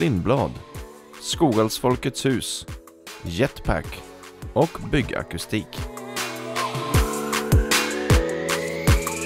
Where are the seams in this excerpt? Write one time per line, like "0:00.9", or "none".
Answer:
0:05.8

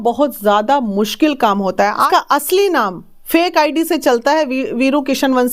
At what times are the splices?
0:02.1

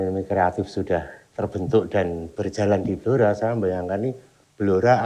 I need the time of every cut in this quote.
0:02.3

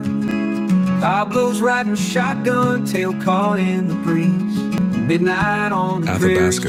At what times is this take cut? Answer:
none

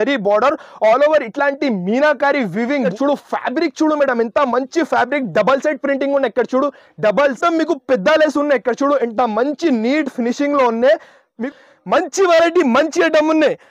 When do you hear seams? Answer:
0:02.9
0:07.4
0:11.4

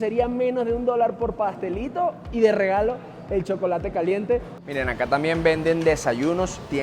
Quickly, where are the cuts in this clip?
0:04.6

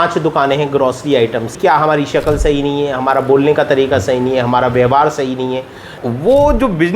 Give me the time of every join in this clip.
0:01.5
0:06.0

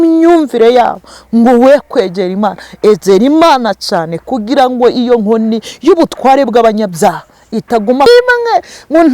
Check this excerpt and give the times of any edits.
0:08.1

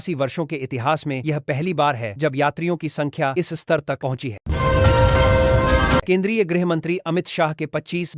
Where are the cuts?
0:04.4
0:06.0

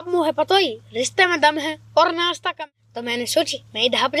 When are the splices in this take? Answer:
0:02.6

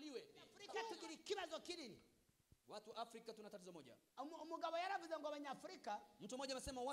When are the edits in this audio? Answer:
0:01.0

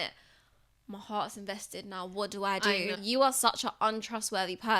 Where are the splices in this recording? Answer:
0:03.0

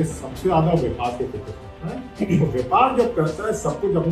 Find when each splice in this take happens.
none

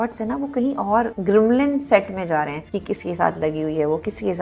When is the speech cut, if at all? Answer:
0:01.2
0:02.7

